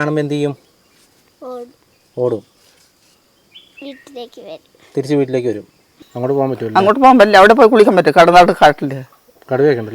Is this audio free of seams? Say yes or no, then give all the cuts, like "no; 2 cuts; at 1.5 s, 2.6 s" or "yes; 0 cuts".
no; 1 cut; at 6.1 s